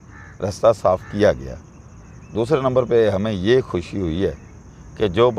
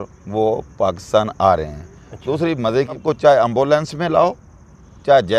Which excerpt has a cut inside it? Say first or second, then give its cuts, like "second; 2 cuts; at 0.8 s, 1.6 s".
second; 1 cut; at 3.0 s